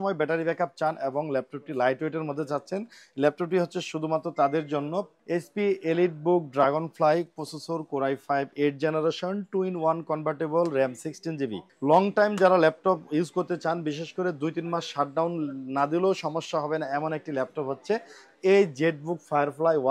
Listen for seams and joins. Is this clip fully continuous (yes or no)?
no